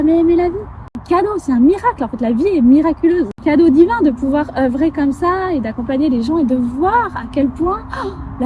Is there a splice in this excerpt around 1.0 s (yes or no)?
yes